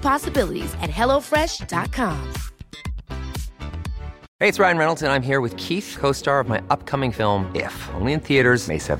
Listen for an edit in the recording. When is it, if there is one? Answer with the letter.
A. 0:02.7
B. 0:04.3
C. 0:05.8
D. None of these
B